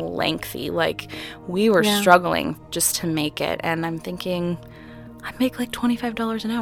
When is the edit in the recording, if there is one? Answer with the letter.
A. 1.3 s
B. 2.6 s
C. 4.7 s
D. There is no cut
B